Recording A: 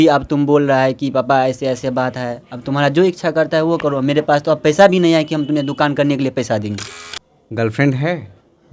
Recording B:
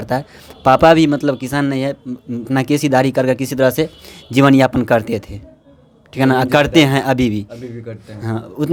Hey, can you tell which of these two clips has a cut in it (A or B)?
A